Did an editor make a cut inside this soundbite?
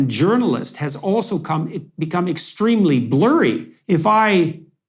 yes; 1 cut; at 3.7 s

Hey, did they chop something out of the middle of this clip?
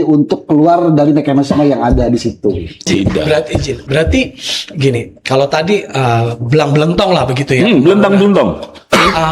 yes; 1 cut; at 3.2 s

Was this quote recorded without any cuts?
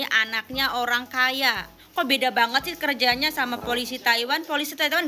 no; 1 cut; at 1.7 s

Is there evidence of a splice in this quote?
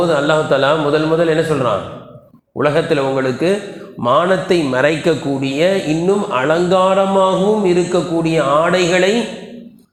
no; 0 cuts

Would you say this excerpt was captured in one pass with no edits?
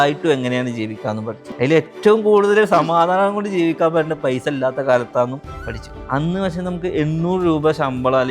no; 2 cuts; at 1.4 s, 5.9 s

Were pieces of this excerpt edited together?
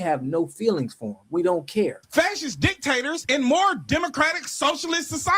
yes; 1 cut; at 2.0 s

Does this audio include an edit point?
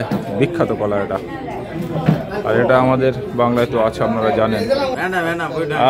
yes; 1 cut; at 4.9 s

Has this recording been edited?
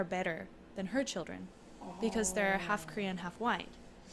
no; 0 cuts

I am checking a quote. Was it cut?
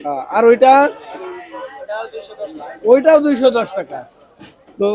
no; 0 cuts

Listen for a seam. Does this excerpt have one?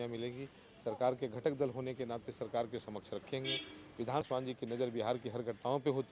yes; 1 cut; at 4.3 s

